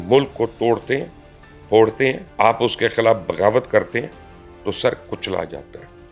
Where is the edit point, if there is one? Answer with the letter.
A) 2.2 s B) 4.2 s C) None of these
A